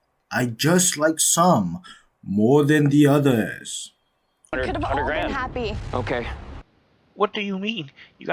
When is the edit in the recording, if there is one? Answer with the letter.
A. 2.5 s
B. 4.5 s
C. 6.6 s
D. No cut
B